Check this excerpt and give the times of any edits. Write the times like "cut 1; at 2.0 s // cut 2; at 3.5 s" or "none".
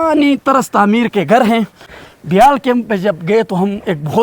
cut 1; at 1.9 s